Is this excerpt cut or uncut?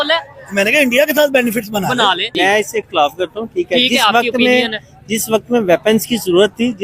cut